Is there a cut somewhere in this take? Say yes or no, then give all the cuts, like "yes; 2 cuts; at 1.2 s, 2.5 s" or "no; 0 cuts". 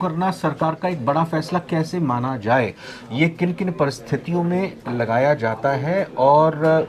no; 0 cuts